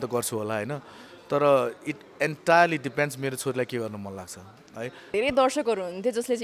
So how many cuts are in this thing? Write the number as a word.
one